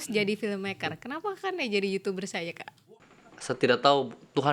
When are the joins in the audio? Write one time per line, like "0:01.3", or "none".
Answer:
0:02.7